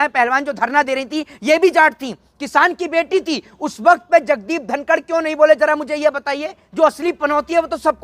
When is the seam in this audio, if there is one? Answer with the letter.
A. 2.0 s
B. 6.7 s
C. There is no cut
B